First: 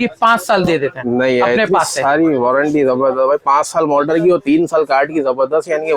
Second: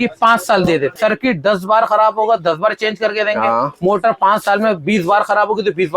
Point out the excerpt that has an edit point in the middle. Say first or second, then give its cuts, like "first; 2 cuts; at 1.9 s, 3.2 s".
second; 1 cut; at 0.9 s